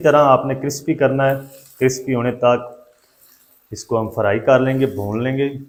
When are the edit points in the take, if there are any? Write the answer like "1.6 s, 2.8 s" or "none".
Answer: none